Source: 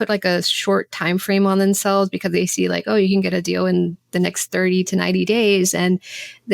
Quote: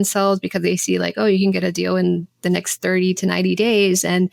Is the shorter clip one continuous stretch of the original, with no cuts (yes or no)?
yes